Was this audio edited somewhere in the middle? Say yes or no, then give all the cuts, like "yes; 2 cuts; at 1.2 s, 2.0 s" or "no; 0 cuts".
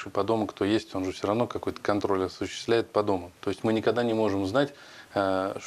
no; 0 cuts